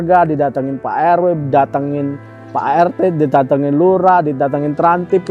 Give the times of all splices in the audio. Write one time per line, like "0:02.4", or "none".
none